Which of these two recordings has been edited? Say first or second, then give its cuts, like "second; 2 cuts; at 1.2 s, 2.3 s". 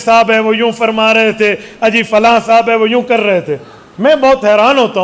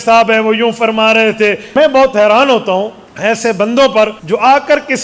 second; 3 cuts; at 1.8 s, 3.0 s, 4.2 s